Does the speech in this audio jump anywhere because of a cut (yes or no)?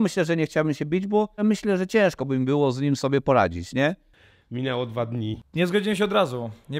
yes